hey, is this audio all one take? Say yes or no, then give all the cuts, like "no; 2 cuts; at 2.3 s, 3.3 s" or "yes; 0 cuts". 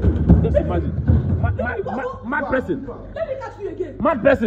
yes; 0 cuts